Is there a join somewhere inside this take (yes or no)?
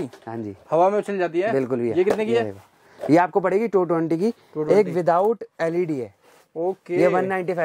no